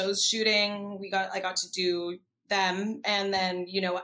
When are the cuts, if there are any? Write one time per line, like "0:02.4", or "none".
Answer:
none